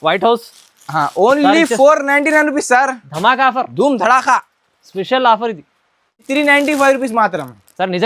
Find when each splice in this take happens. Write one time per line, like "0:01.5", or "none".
0:06.3